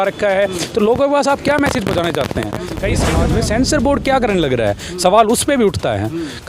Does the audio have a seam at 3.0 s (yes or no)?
yes